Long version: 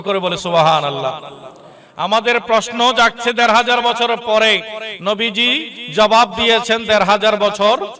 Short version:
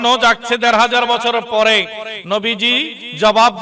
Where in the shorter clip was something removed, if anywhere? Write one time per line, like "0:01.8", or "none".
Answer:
none